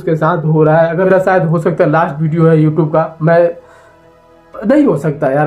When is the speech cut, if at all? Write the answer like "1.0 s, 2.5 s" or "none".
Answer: 1.1 s